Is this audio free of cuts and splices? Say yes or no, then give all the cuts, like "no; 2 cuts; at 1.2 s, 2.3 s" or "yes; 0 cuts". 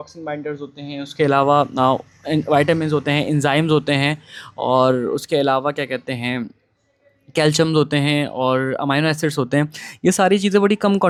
yes; 0 cuts